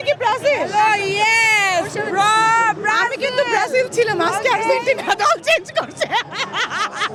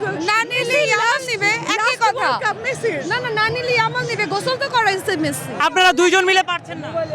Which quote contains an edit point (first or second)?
second